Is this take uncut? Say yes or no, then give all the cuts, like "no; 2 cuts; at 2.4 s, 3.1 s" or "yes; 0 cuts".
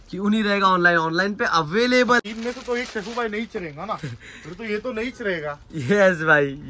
no; 1 cut; at 2.2 s